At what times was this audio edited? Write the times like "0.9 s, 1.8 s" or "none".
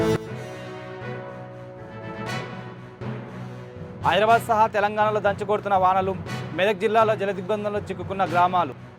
3.2 s